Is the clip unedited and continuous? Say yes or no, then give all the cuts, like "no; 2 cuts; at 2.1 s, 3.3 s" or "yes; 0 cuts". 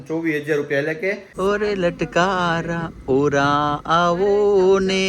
no; 1 cut; at 1.3 s